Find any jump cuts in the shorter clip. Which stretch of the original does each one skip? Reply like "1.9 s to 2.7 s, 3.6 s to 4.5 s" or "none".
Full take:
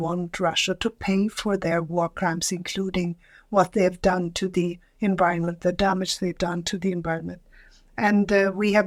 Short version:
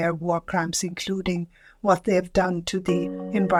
none